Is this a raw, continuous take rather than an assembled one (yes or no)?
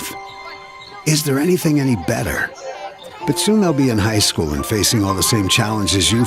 yes